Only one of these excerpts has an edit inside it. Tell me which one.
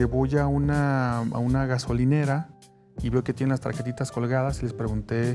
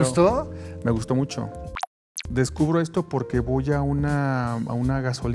second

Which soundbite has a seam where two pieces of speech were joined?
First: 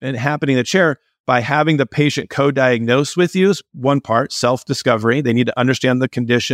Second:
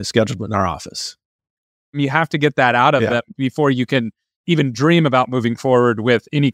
second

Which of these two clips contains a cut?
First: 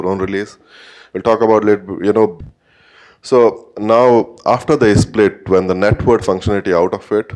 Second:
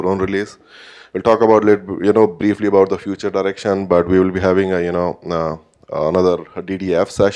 second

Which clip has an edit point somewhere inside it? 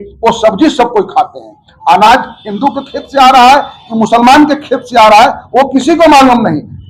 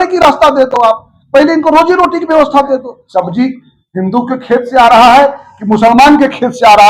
second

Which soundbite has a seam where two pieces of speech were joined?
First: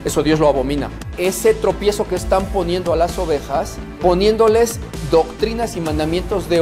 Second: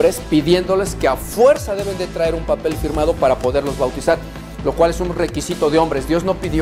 first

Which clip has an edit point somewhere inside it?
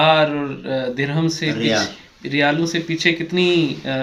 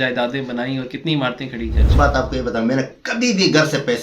second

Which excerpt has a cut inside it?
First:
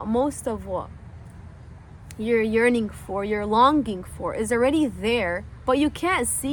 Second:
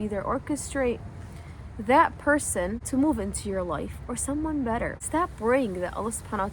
second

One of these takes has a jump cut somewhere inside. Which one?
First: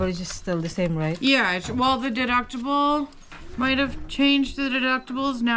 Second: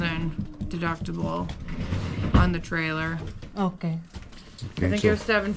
second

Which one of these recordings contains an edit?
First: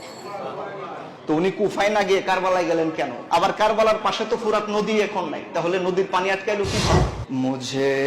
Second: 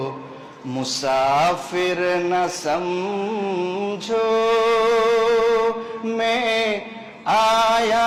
first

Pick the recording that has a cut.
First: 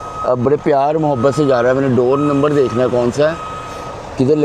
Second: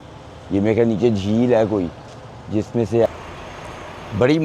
second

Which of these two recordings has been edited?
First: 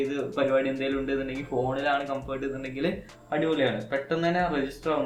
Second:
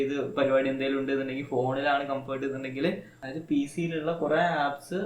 second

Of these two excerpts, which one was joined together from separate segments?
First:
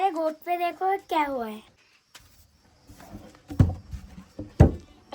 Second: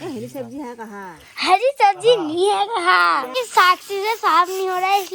second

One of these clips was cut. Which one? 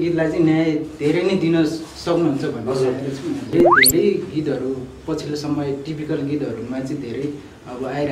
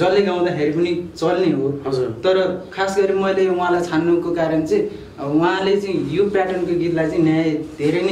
first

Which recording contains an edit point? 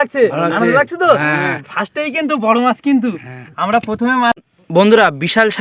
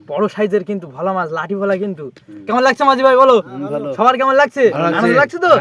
first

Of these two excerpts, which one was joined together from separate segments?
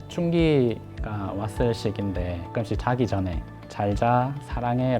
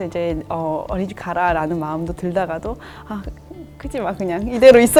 first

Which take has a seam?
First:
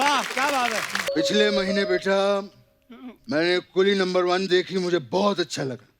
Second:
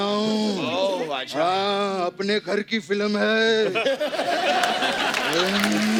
first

